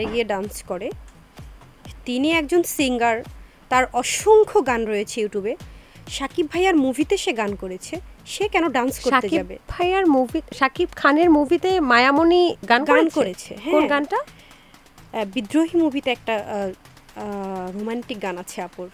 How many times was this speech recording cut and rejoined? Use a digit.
0